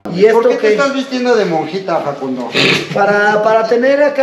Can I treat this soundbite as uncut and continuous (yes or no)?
yes